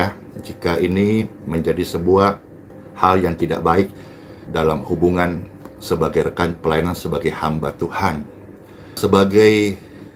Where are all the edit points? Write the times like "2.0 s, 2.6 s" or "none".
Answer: none